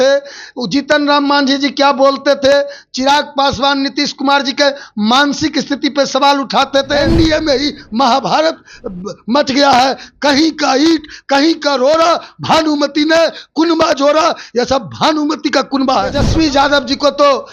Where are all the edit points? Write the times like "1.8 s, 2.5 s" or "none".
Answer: 7.1 s, 16.2 s